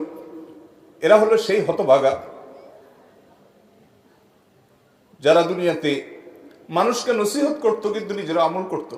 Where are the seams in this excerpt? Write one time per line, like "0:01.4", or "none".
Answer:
none